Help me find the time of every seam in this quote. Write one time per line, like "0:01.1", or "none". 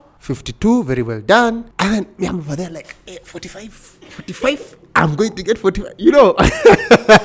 none